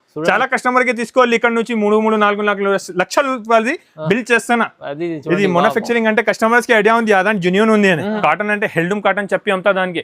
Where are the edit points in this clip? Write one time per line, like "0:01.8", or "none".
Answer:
0:08.2